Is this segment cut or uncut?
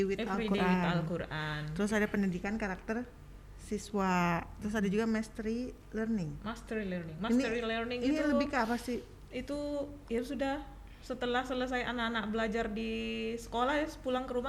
uncut